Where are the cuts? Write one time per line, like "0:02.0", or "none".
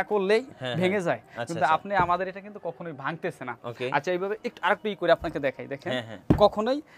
none